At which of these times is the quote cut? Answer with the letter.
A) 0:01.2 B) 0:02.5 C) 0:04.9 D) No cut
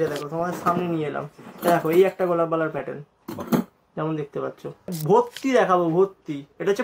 C